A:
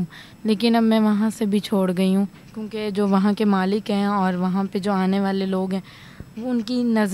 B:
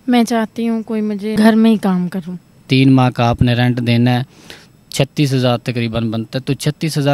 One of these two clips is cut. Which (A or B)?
B